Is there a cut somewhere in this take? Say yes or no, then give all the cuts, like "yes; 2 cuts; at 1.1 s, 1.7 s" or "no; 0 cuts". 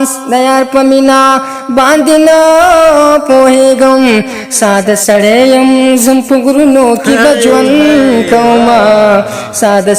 no; 0 cuts